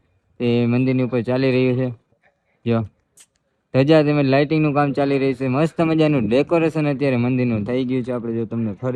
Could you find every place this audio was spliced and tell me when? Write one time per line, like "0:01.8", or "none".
none